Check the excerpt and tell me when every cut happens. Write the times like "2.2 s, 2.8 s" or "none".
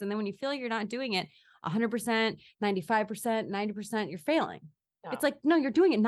none